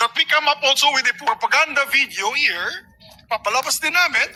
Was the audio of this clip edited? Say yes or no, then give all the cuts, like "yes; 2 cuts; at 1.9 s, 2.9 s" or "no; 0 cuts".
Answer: no; 0 cuts